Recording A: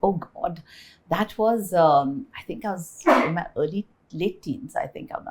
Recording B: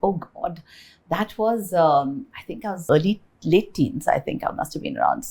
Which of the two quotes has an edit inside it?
B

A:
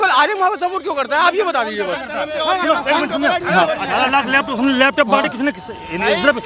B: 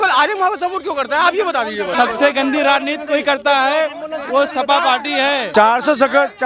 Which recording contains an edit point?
B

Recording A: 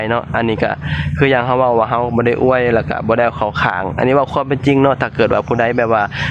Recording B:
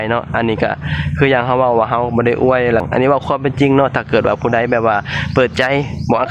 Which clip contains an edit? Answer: B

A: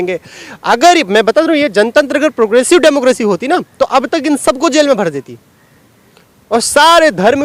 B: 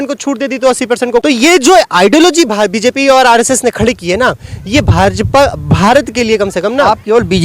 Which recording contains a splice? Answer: B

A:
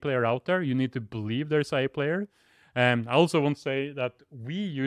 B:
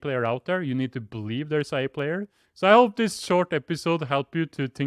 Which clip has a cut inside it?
B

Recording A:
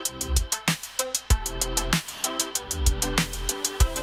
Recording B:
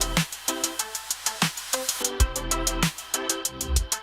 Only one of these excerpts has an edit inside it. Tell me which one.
B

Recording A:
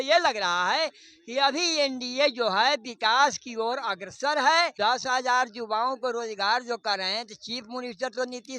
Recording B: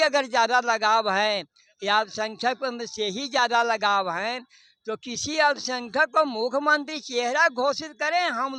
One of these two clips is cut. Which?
A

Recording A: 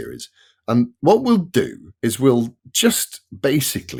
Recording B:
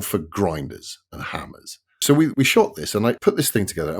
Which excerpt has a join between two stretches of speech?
B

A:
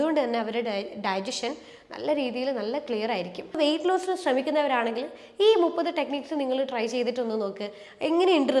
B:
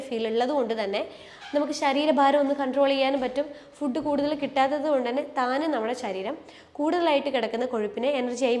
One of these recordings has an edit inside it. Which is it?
A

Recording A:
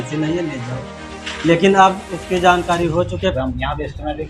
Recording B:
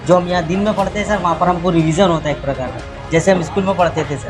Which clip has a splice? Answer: A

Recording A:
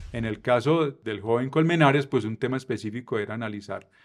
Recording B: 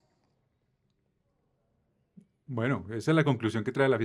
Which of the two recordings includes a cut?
A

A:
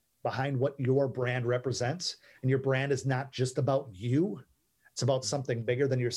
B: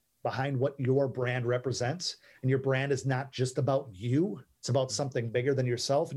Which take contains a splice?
B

